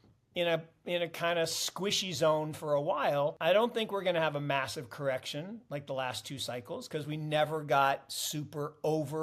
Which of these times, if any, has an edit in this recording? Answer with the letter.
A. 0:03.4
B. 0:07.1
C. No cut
A